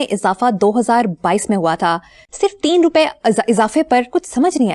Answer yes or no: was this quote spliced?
yes